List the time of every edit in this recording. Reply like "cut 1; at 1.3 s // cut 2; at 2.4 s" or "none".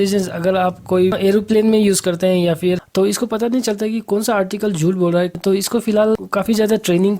cut 1; at 2.8 s // cut 2; at 5.4 s